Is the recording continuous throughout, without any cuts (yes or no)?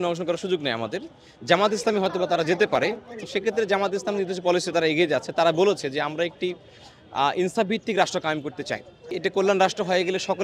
no